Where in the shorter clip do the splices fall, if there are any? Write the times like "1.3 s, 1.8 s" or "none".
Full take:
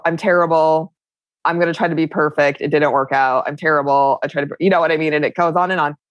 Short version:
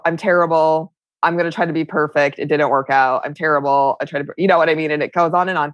1.0 s